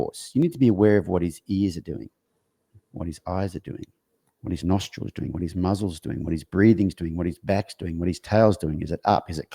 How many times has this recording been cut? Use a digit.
0